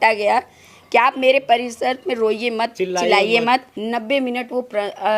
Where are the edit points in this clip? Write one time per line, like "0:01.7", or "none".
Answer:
0:03.7

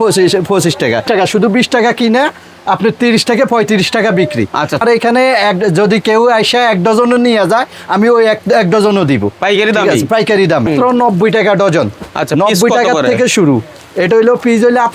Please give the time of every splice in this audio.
0:01.0
0:04.8
0:10.7

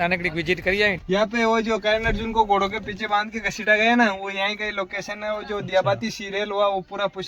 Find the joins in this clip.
0:01.0

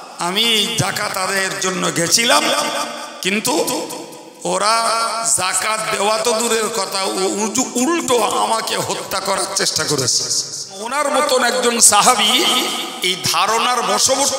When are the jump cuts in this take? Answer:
0:10.9

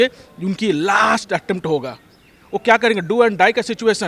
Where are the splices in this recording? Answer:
none

